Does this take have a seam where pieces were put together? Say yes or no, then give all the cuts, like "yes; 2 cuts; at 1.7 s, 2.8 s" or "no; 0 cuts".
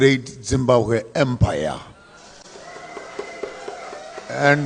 no; 0 cuts